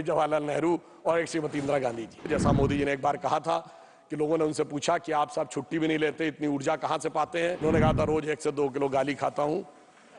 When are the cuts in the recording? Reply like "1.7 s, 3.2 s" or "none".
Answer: 2.3 s, 7.6 s